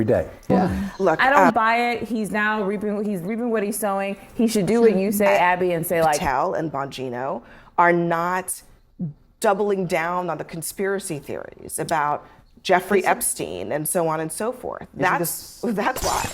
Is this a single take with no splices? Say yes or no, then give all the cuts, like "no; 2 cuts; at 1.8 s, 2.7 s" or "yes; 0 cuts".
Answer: no; 2 cuts; at 1.2 s, 6.2 s